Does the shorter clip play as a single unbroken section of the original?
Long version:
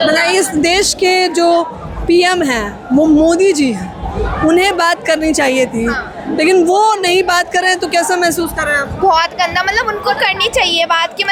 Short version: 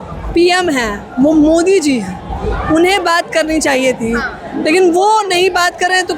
yes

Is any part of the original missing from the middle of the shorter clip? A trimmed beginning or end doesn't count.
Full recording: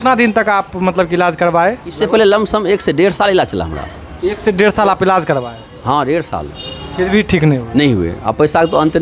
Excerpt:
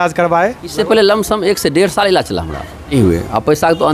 yes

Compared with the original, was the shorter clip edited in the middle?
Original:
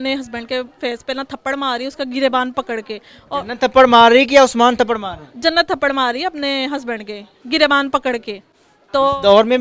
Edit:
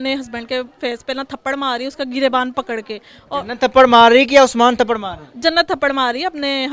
no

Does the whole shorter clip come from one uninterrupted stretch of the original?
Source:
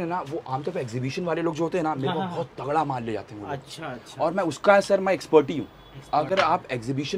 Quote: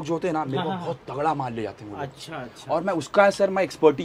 yes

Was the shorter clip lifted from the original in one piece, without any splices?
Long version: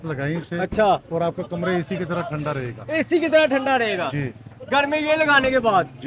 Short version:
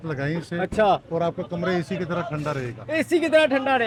yes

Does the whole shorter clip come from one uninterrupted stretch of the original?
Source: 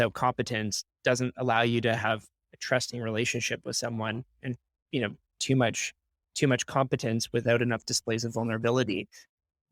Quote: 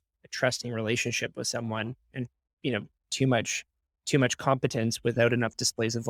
yes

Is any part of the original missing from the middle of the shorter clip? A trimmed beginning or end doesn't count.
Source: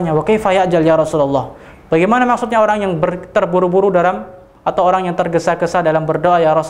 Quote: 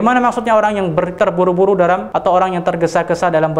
yes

